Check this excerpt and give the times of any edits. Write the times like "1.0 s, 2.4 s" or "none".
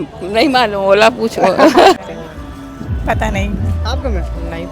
2.0 s